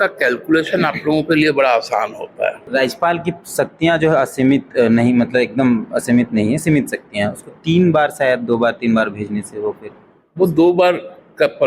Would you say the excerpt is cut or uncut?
cut